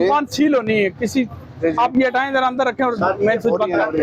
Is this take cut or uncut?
uncut